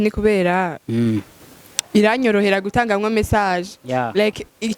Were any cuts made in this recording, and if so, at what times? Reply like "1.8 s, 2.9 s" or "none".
none